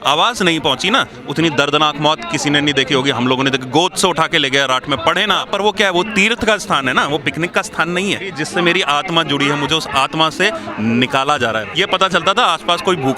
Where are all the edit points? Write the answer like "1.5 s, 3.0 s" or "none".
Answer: 1.2 s, 5.5 s, 8.4 s, 11.7 s